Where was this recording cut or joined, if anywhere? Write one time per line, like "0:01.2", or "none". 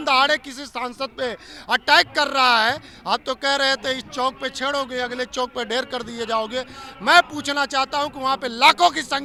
none